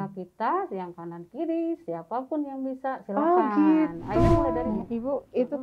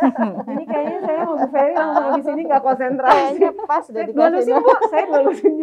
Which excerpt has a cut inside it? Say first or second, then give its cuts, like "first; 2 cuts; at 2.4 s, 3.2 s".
first; 1 cut; at 4.7 s